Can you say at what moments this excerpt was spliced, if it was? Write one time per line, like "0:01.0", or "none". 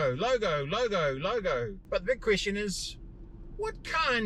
0:01.8